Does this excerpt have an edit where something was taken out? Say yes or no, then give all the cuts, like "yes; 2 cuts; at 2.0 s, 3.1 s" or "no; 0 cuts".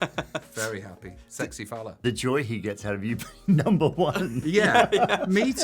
yes; 1 cut; at 1.9 s